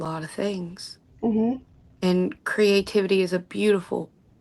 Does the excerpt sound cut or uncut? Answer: uncut